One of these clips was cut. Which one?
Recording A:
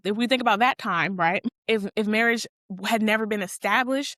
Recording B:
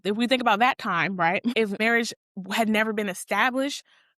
B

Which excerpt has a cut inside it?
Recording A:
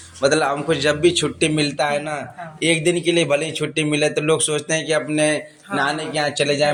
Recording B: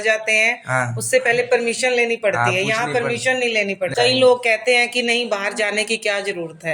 B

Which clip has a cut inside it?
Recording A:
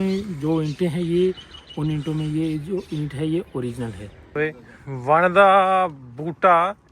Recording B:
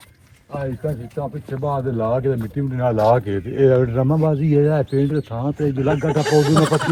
A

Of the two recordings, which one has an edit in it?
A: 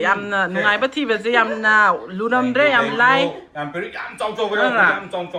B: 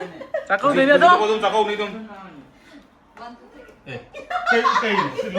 B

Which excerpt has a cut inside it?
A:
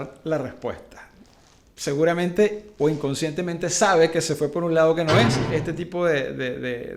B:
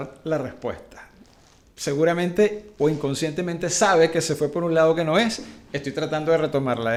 A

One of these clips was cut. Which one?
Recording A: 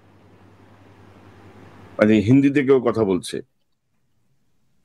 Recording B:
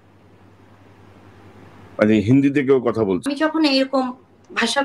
B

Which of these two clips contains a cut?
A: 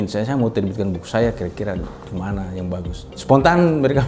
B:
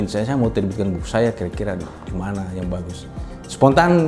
A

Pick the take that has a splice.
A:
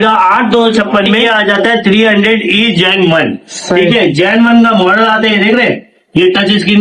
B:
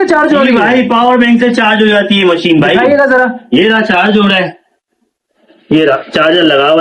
A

